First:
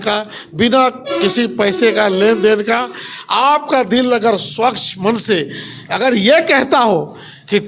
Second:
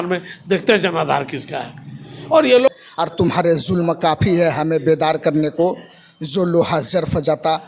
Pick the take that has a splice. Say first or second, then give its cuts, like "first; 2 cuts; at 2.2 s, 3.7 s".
second; 1 cut; at 2.7 s